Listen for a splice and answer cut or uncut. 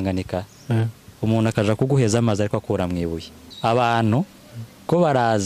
cut